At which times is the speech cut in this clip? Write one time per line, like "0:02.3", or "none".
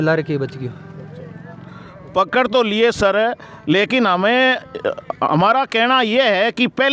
none